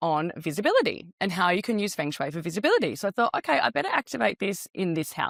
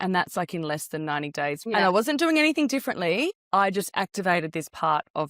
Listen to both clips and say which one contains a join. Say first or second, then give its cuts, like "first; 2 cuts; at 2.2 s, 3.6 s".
second; 2 cuts; at 1.6 s, 3.4 s